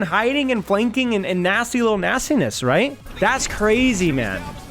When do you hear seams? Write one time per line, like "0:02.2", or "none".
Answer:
0:03.0

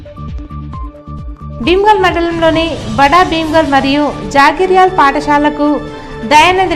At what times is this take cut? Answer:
0:01.2

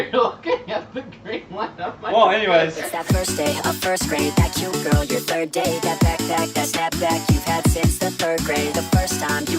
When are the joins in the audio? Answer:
0:02.9

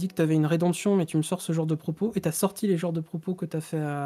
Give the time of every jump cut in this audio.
none

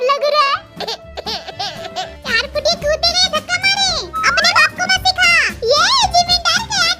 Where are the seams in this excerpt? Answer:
0:02.2

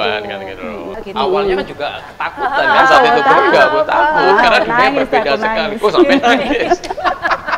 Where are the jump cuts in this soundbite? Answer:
0:01.0

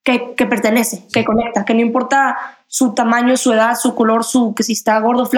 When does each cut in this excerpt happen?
0:01.1

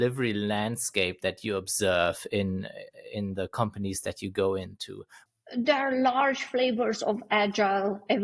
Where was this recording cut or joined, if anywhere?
none

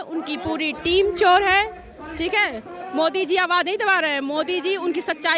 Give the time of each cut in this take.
none

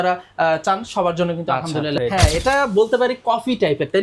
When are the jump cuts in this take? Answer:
0:02.0

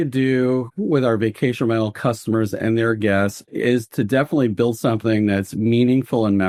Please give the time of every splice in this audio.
none

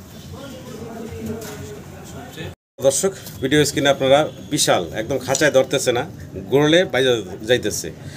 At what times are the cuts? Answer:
none

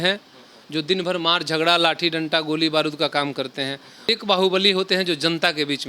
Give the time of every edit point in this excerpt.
0:04.1

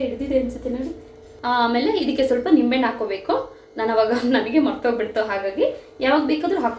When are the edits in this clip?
0:01.2

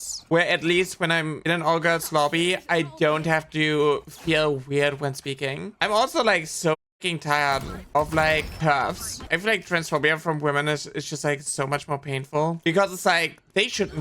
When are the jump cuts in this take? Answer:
0:05.7
0:08.6

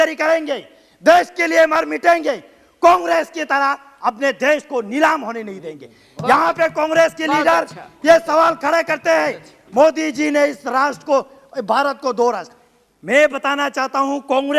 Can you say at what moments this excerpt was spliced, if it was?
none

